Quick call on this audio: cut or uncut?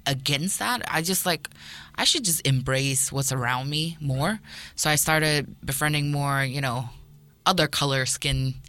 uncut